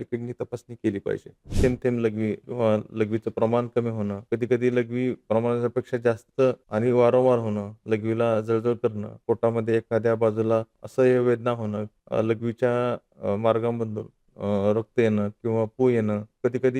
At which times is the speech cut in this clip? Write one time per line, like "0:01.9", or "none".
0:01.4